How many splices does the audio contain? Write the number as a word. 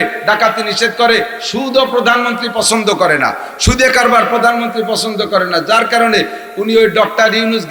zero